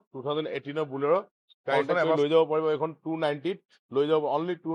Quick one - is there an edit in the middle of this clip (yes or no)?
yes